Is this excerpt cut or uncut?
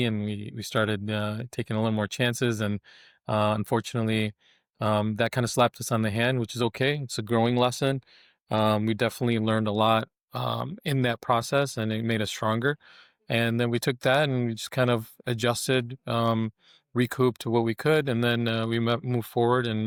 uncut